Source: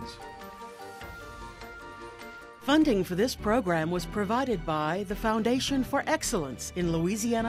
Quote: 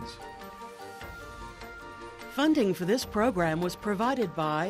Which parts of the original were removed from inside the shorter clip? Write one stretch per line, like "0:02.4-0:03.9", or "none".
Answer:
0:02.3-0:02.6